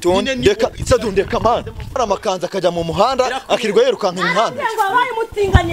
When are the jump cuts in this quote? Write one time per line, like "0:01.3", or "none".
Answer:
0:02.0